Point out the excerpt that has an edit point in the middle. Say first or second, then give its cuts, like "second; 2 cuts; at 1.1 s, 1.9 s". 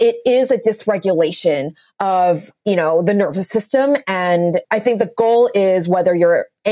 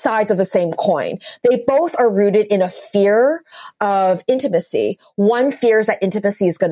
first; 2 cuts; at 2.5 s, 4.6 s